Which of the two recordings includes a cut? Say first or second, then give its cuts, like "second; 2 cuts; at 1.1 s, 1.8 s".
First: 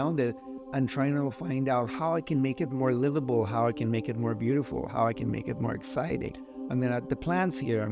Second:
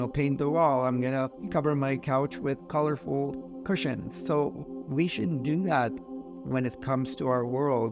second; 2 cuts; at 1.4 s, 2.6 s